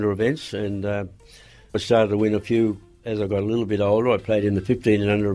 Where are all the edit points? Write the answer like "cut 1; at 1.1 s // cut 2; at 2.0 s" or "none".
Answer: cut 1; at 3.0 s